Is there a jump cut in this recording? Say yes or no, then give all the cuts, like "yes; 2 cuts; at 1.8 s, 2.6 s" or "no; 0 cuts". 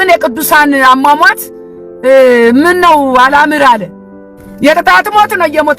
no; 0 cuts